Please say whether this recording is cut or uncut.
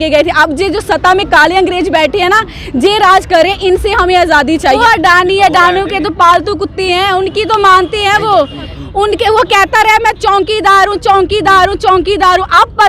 cut